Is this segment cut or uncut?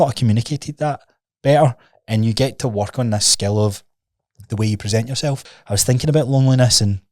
cut